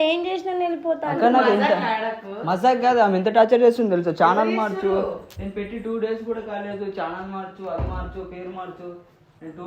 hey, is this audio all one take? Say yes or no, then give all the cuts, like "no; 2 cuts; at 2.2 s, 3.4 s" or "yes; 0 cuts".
yes; 0 cuts